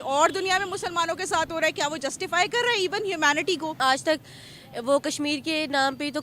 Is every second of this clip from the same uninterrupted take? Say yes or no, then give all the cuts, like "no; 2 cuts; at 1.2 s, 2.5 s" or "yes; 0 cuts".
no; 1 cut; at 3.8 s